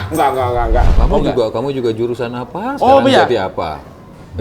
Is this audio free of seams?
no; 1 cut; at 0.9 s

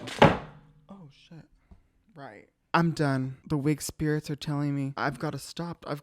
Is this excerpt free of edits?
no; 1 cut; at 3.4 s

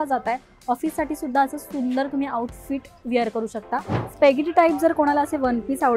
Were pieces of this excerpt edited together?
yes; 1 cut; at 4.0 s

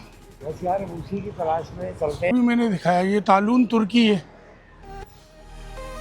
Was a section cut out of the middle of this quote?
yes; 1 cut; at 2.3 s

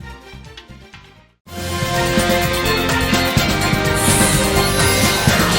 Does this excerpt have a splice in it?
yes; 1 cut; at 4.0 s

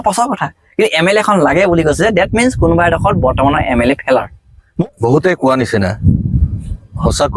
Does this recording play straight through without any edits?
no; 1 cut; at 4.8 s

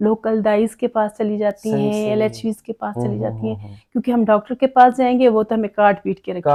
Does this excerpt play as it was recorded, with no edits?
yes; 0 cuts

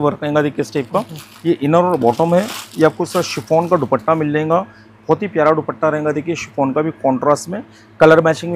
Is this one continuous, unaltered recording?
yes; 0 cuts

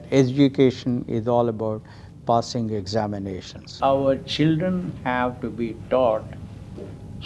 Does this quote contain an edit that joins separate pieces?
yes; 1 cut; at 3.7 s

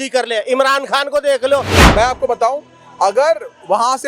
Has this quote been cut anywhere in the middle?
yes; 1 cut; at 1.8 s

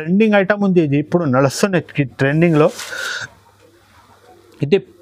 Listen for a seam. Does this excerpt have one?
no; 0 cuts

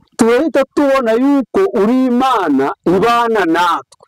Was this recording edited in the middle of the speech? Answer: no; 0 cuts

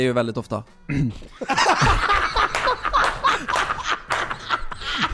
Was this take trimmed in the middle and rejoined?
no; 0 cuts

